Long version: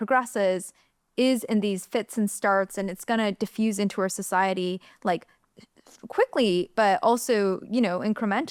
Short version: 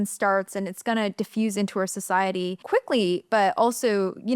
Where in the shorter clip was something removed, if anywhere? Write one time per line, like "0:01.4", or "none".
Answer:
0:02.6